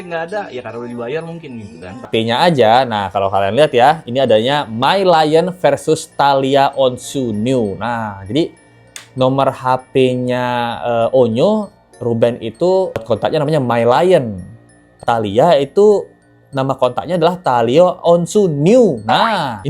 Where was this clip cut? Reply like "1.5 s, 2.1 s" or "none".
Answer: 2.1 s, 14.9 s